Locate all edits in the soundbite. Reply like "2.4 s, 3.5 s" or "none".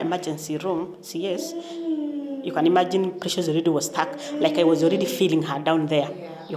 none